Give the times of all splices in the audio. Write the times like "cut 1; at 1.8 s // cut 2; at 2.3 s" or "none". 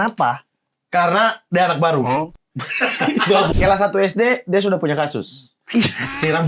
cut 1; at 3.5 s